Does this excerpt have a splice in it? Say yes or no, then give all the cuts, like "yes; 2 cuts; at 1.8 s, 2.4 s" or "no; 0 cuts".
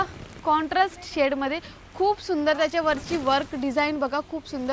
no; 0 cuts